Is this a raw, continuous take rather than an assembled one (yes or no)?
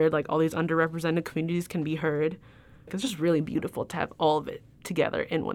yes